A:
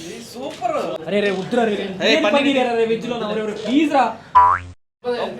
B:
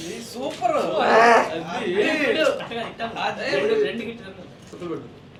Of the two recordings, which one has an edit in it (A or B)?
A